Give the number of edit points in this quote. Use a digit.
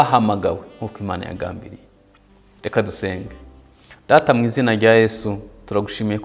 0